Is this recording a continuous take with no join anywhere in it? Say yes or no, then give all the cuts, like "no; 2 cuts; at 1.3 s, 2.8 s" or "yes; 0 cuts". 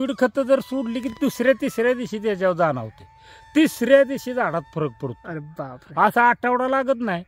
yes; 0 cuts